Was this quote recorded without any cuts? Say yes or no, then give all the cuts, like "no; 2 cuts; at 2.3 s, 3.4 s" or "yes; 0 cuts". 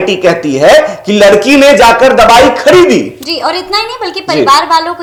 yes; 0 cuts